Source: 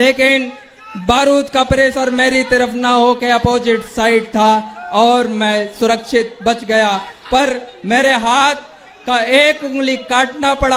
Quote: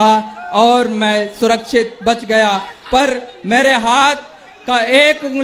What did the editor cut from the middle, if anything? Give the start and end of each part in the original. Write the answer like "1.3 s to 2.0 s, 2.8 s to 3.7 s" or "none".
none